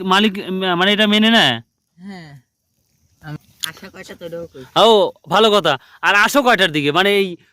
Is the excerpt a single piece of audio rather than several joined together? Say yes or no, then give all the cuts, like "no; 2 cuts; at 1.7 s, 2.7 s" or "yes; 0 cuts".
yes; 0 cuts